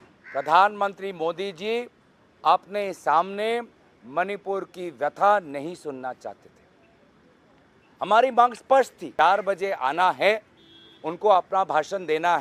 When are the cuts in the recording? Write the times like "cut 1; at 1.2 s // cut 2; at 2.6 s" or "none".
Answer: cut 1; at 9.0 s